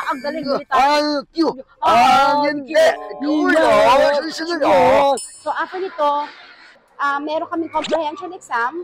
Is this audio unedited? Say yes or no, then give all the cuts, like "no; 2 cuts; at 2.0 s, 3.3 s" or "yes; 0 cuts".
no; 2 cuts; at 3.1 s, 5.3 s